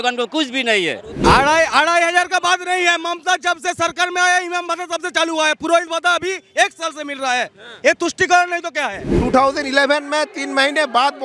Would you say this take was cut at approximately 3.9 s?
no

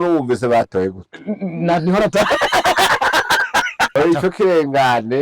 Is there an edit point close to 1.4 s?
no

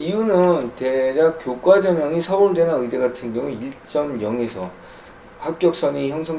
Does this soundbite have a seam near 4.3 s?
no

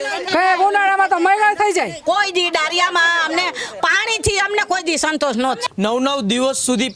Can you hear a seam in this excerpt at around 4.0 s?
no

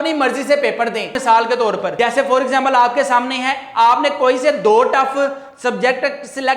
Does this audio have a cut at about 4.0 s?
no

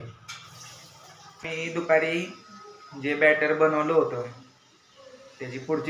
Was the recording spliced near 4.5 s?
no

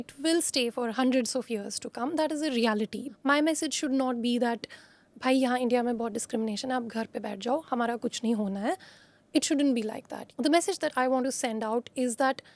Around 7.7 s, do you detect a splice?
no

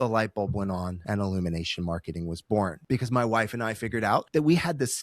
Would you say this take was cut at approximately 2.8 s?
yes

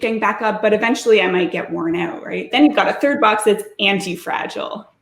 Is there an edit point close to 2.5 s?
yes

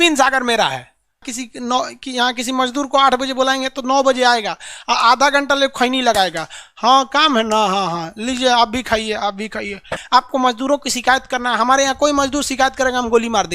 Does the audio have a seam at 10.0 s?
yes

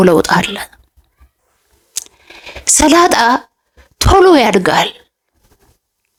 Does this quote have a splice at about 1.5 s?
no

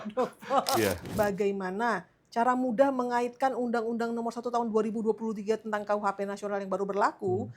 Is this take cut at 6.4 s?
no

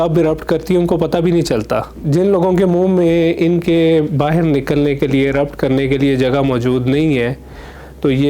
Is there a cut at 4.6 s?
no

